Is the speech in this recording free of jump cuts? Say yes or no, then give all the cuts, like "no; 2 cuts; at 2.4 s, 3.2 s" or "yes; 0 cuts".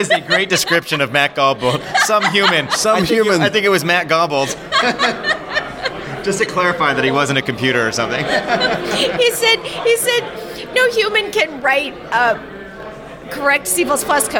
yes; 0 cuts